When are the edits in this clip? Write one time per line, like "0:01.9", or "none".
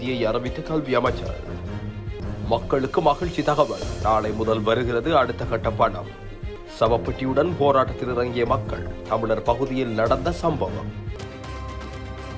0:11.1